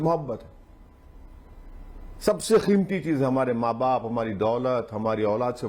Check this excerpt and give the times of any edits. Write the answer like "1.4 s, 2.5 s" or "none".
none